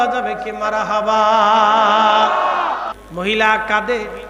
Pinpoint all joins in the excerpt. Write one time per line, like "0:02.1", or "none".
0:03.0